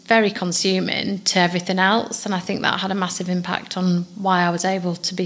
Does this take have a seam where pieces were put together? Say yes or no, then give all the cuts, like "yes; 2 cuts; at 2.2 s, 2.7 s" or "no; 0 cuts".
no; 0 cuts